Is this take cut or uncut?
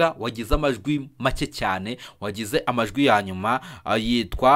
uncut